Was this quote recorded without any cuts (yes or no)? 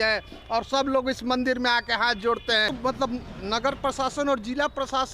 no